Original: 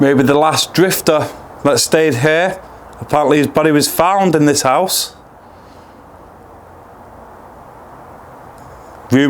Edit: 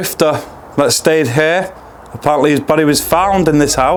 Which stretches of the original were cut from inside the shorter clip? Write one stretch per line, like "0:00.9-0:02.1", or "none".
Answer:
none